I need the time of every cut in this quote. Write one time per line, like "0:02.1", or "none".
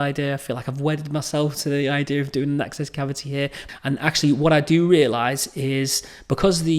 0:03.6